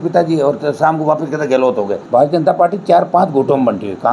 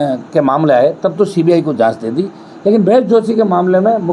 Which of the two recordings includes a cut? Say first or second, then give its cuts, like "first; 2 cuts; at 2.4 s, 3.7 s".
first; 1 cut; at 2.0 s